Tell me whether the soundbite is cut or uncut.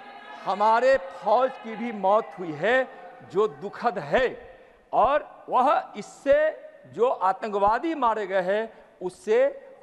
uncut